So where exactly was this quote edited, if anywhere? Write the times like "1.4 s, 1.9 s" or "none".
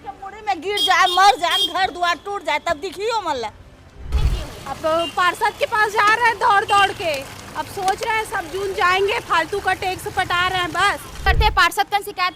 4.1 s, 11.2 s